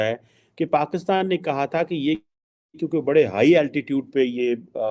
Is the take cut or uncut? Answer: uncut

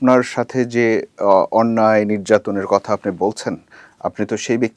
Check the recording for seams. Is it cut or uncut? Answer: uncut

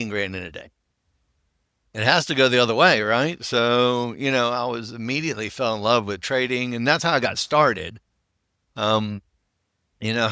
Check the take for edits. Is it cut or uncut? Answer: uncut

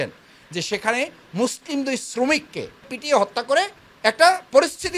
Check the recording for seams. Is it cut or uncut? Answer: cut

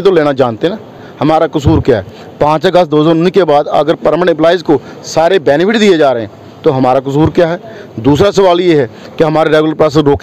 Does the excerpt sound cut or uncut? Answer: uncut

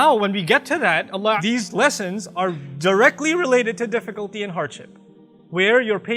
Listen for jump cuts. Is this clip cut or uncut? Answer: cut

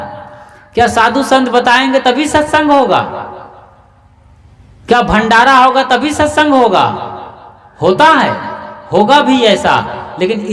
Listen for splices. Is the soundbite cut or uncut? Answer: uncut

